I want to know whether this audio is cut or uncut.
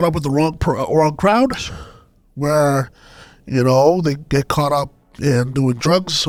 uncut